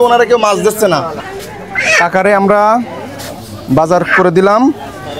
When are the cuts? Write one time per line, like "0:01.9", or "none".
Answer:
0:01.2